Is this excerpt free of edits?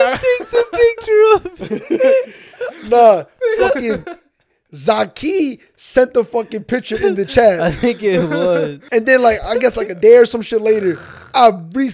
no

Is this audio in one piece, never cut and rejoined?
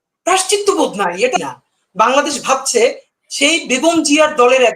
no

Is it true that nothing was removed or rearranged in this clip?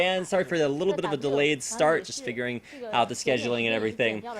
no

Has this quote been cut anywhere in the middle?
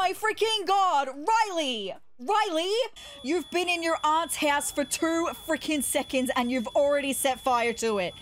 yes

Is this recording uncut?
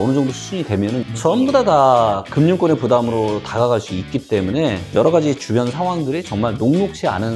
no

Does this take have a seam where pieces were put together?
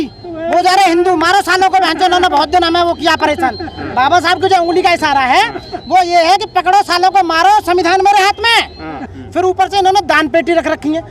yes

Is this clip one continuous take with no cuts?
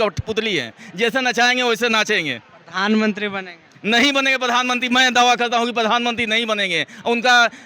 yes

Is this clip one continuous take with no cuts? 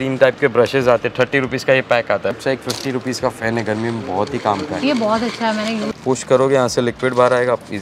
no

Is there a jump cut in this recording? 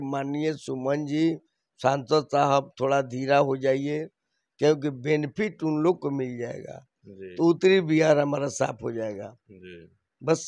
no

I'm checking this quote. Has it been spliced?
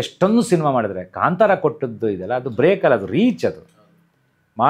no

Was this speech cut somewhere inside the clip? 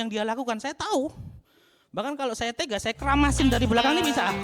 no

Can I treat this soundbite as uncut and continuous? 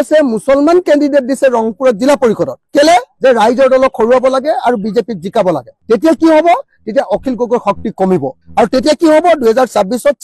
yes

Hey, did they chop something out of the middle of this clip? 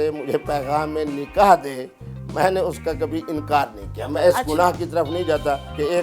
no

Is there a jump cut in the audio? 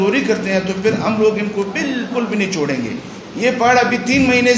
no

